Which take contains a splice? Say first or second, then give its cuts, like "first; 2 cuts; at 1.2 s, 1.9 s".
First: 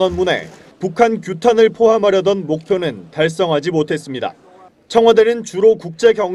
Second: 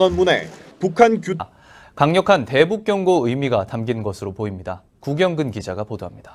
first; 1 cut; at 1.3 s